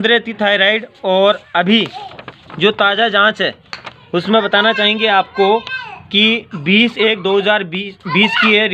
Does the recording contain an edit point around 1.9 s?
no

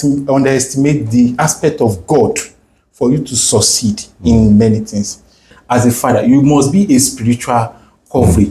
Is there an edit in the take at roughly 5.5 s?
yes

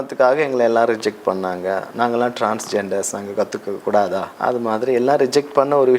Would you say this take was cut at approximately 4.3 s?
yes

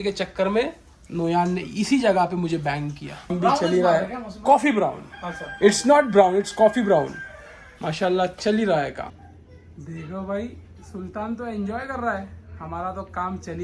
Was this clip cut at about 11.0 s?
no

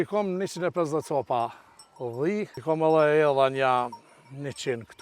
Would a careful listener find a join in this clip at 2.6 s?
yes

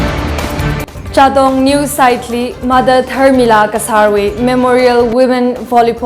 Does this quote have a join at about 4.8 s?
no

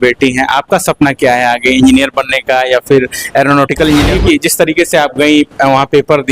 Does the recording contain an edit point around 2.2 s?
no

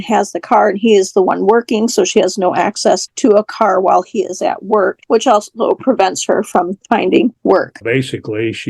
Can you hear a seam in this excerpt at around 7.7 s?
yes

